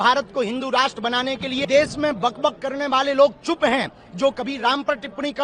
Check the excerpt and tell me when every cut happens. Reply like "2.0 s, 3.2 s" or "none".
1.6 s